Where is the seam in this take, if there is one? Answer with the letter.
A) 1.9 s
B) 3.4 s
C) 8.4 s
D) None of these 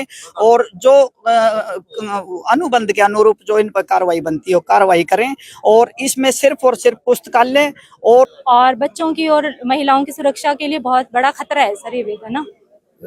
C